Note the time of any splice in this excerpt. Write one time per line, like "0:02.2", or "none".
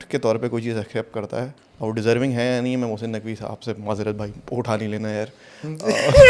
0:01.6